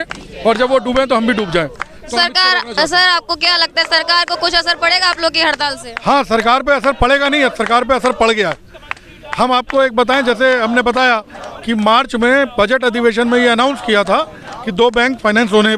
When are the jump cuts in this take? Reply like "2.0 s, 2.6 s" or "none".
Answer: none